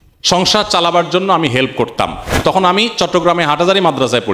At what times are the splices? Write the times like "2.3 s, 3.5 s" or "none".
2.4 s